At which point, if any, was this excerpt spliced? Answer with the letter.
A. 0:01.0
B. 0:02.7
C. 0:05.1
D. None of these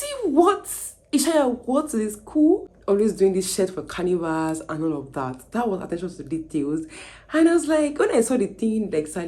B